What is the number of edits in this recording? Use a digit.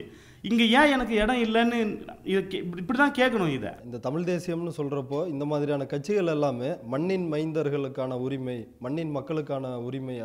1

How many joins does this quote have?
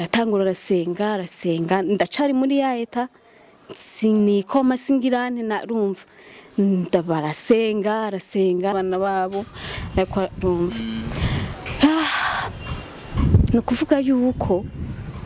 1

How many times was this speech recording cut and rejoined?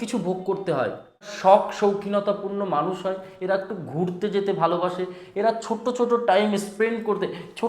1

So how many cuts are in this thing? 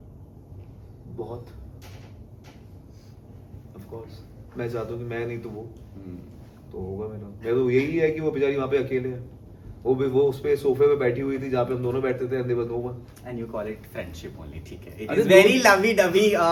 0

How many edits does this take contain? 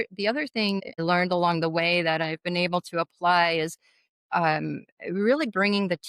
1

